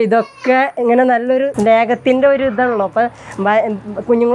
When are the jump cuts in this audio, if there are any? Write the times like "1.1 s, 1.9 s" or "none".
1.5 s